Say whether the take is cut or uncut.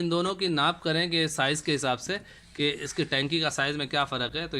uncut